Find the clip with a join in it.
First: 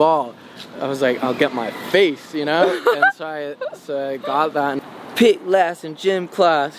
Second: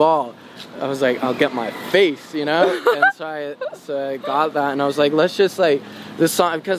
first; 1 cut; at 4.8 s

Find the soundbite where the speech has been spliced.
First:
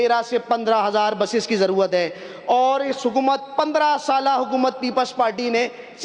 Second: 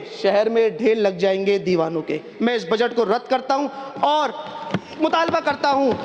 second; 1 cut; at 2.3 s

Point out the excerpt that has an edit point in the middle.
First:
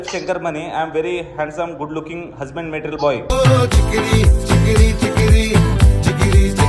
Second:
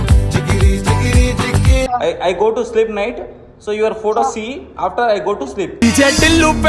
second; 1 cut; at 1.9 s

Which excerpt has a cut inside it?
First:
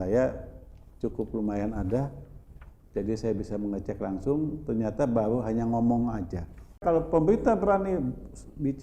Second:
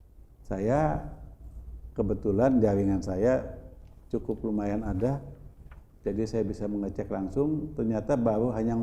first; 1 cut; at 6.8 s

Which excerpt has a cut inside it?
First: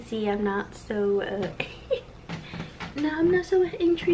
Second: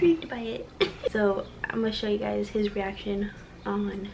second; 1 cut; at 1.1 s

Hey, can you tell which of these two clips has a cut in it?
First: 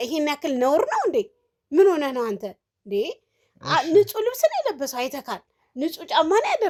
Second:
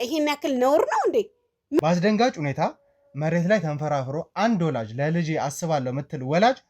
second; 1 cut; at 1.8 s

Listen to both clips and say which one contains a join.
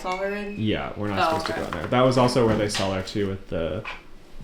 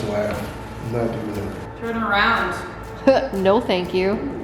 second; 1 cut; at 1.6 s

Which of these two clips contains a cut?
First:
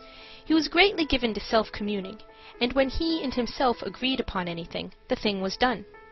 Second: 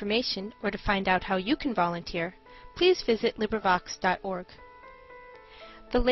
first; 1 cut; at 1.9 s

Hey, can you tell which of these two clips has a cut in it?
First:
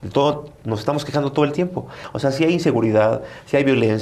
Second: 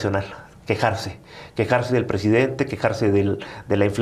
first; 1 cut; at 2.0 s

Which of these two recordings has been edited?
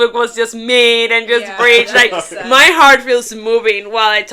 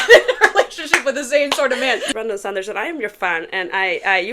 second; 1 cut; at 2.1 s

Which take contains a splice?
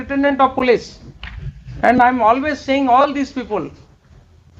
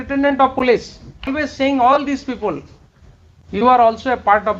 second; 1 cut; at 1.4 s

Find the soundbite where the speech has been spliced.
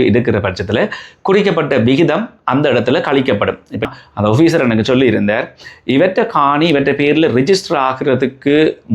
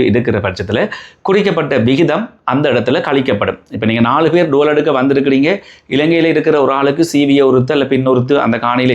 first; 1 cut; at 3.8 s

